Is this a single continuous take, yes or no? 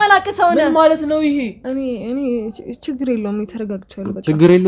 no